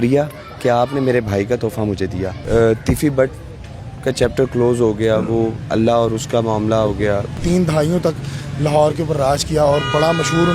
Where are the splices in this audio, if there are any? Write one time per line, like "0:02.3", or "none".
0:02.4
0:07.4

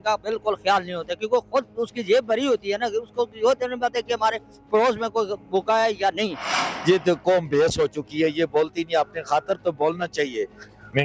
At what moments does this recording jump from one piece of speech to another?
0:06.7

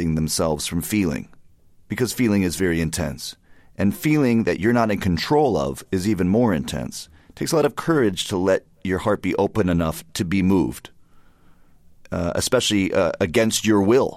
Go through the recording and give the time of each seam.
0:09.5

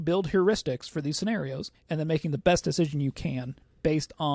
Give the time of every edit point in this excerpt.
0:01.7

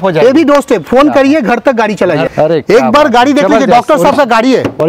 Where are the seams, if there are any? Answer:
0:02.3

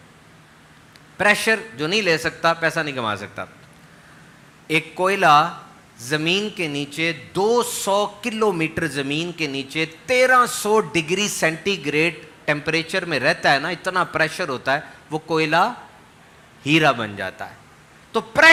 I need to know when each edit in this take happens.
none

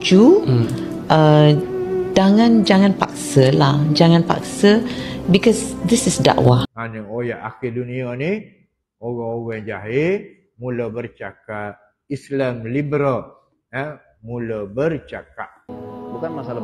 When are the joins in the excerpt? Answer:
0:06.7
0:15.7

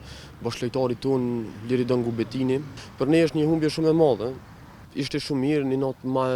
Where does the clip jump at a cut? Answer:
0:02.8

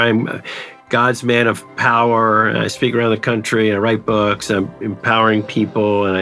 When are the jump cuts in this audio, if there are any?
none

